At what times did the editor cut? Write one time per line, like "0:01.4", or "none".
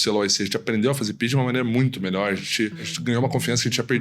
0:02.9